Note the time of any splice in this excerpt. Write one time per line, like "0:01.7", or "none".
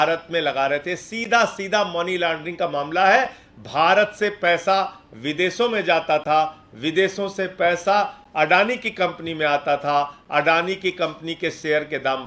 none